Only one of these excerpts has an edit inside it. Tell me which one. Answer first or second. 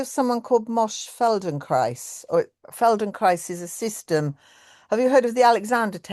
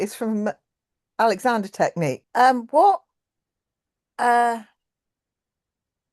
second